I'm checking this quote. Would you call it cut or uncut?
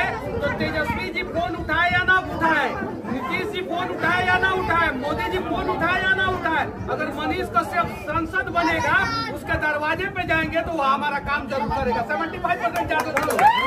uncut